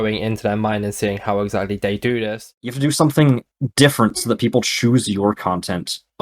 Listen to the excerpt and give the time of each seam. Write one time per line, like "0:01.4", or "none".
0:02.6